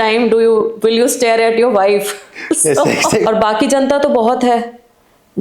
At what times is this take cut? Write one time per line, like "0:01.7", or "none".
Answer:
0:03.3